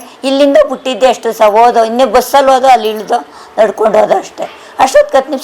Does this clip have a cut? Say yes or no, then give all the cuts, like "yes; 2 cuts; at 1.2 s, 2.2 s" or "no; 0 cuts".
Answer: no; 0 cuts